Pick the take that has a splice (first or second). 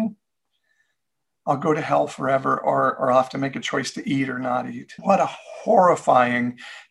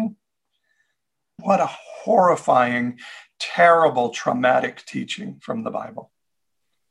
second